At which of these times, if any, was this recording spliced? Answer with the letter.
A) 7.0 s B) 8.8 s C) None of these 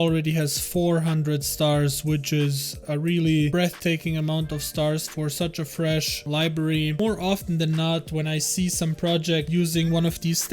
A